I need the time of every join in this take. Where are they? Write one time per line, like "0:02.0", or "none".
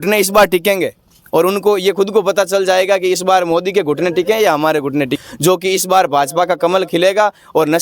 0:05.1